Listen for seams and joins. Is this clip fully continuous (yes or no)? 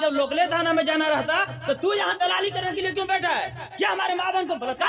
yes